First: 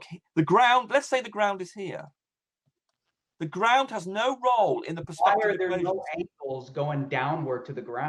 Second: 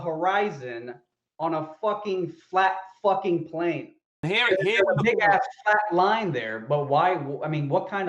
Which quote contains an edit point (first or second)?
second